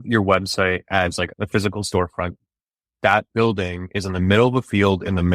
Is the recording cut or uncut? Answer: cut